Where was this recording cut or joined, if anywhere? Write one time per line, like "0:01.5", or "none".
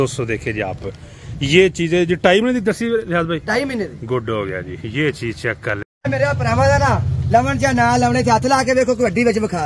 0:05.9